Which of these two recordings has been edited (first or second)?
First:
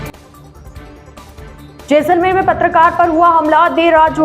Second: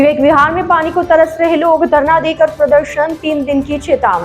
first